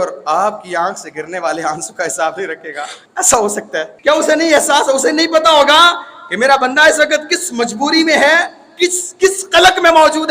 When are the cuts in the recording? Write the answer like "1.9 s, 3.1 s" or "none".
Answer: 3.0 s, 3.9 s